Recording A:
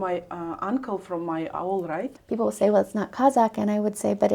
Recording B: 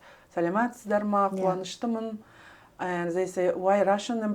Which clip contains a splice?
A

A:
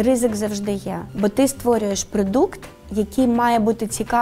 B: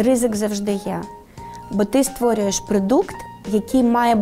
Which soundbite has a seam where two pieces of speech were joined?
A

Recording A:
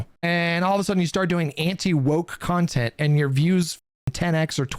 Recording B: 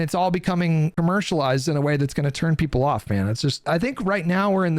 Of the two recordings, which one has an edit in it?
B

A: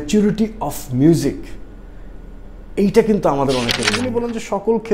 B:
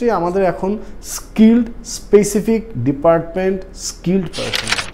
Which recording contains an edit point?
A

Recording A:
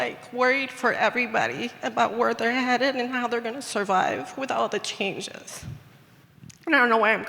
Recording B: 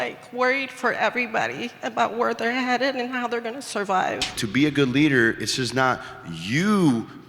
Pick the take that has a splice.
B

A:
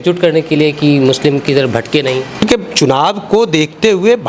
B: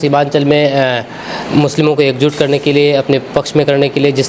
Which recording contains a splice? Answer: A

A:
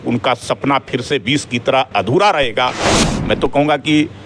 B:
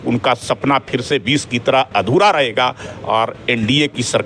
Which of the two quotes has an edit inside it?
A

